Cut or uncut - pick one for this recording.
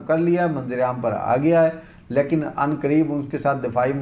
uncut